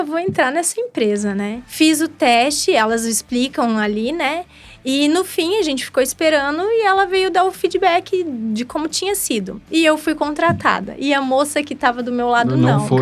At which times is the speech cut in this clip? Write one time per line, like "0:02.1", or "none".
0:01.6